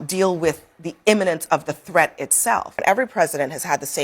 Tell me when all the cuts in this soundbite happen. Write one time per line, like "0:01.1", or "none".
0:02.8

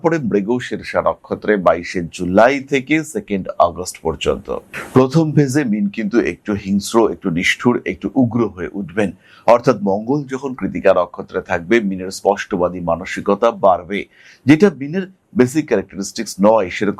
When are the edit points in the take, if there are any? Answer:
none

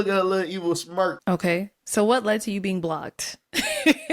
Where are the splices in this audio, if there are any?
0:01.2

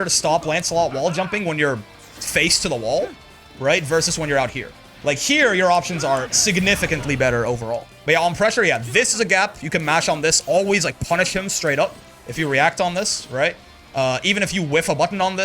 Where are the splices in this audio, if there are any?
0:07.9

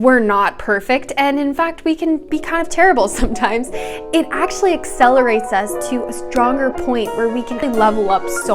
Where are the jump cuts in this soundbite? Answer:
0:07.6

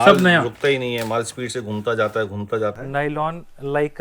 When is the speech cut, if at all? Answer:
0:02.7

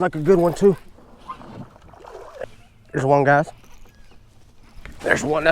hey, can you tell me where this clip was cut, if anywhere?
0:02.4

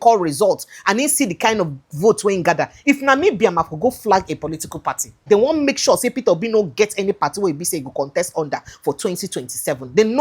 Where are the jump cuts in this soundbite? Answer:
0:05.2

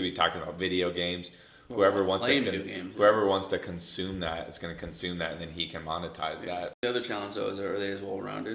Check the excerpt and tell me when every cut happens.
0:06.8

